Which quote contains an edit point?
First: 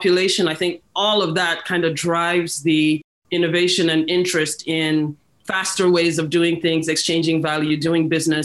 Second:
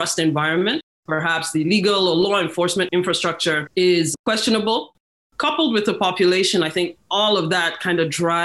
second; 3 cuts; at 0.9 s, 3.2 s, 5.0 s

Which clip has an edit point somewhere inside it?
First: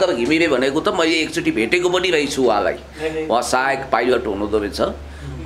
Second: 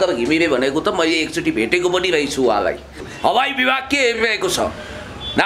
second; 1 cut; at 3.0 s

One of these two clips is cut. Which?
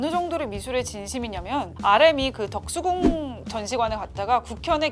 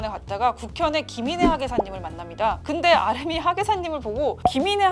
first; 1 cut; at 1.7 s

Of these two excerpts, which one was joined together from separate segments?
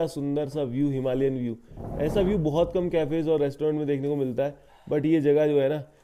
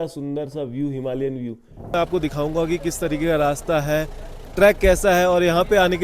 second; 1 cut; at 2.0 s

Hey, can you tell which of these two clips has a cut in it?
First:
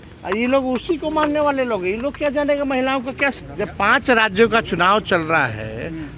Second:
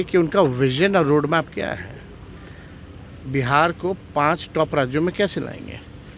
first; 1 cut; at 3.3 s

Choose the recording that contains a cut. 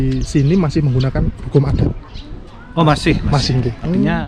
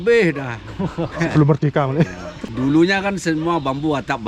second; 1 cut; at 2.5 s

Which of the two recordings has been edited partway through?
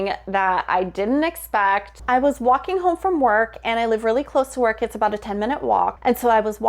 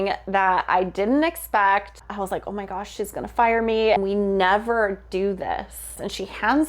second; 3 cuts; at 2.0 s, 4.0 s, 5.9 s

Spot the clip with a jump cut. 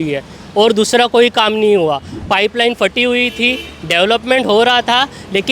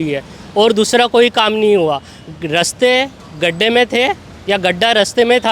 first; 1 cut; at 2.1 s

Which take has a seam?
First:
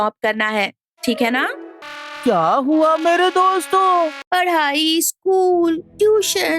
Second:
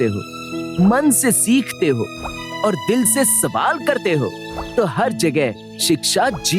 first; 2 cuts; at 1.7 s, 4.2 s

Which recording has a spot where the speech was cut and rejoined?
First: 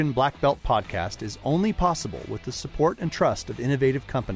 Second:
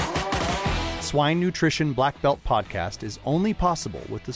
second; 1 cut; at 0.9 s

